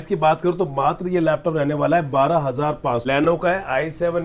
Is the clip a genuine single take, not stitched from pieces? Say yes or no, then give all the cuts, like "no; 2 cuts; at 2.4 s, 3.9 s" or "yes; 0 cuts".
no; 1 cut; at 3.0 s